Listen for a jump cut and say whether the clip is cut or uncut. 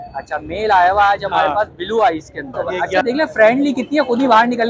cut